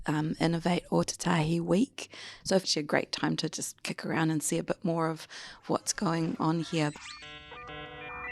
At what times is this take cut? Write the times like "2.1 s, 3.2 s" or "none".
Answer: 2.3 s, 6.9 s